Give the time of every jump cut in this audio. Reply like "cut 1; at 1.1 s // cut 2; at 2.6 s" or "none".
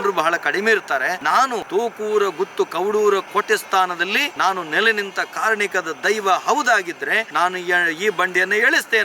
cut 1; at 1.4 s // cut 2; at 4.3 s // cut 3; at 7.3 s